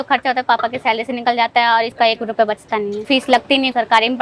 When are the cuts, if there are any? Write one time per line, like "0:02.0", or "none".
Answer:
0:01.9
0:03.4